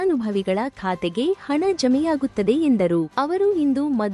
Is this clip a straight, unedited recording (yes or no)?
no